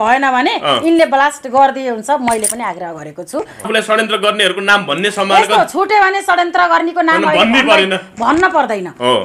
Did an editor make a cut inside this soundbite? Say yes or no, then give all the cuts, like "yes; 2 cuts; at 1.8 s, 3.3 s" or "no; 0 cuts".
yes; 1 cut; at 3.7 s